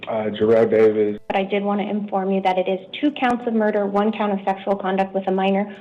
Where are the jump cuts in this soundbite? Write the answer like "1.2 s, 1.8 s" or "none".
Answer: 1.2 s